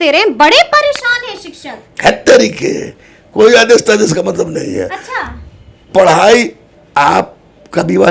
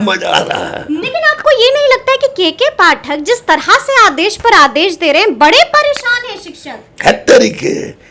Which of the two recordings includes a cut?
second; 1 cut; at 1.0 s

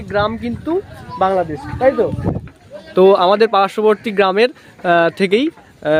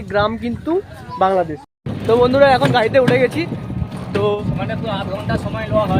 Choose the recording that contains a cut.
second; 2 cuts; at 1.6 s, 4.4 s

